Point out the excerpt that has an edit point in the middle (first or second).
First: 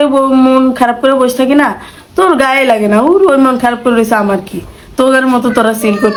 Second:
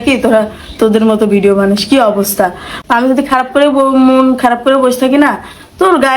second